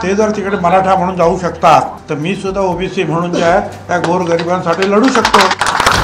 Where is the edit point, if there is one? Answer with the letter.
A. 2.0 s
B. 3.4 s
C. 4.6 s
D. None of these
A